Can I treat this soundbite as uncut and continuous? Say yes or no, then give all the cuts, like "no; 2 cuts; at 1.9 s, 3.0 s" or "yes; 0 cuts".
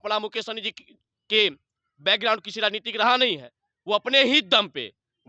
yes; 0 cuts